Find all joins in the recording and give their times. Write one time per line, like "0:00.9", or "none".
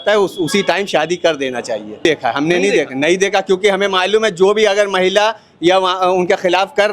0:02.0